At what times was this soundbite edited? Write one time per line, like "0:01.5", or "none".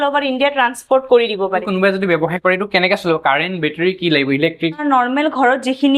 0:01.6
0:04.8